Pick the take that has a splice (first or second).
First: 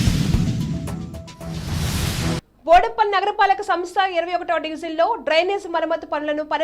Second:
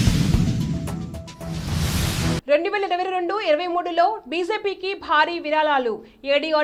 first